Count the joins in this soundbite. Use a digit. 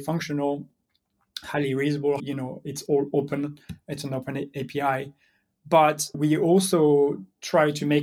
2